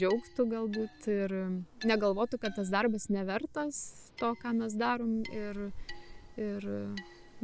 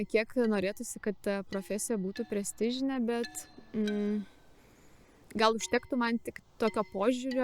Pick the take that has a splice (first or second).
first